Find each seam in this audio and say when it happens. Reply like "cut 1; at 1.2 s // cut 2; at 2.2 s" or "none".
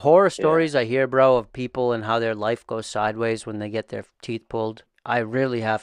cut 1; at 4.9 s

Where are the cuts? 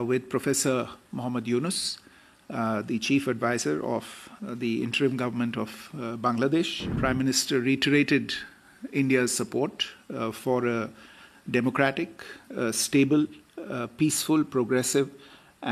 cut 1; at 6.9 s

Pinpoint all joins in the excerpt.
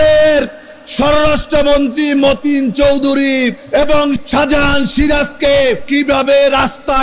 cut 1; at 3.9 s // cut 2; at 5.8 s

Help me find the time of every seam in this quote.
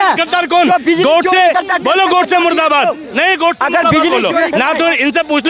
cut 1; at 4.5 s

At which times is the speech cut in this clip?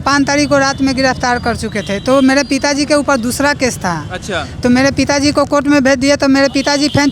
none

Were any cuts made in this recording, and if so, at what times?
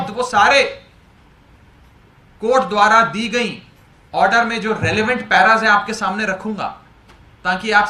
none

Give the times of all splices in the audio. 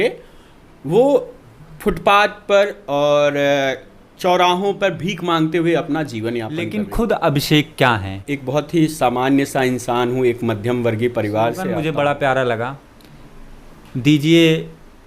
cut 1; at 6.7 s // cut 2; at 8.3 s // cut 3; at 11.7 s

